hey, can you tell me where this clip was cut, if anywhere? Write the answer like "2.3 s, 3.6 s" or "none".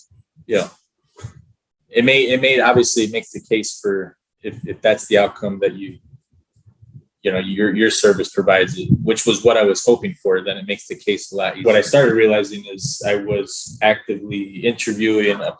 11.6 s